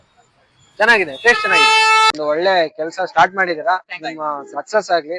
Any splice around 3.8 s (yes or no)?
no